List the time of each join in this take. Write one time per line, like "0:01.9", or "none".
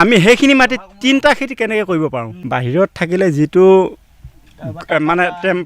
0:02.3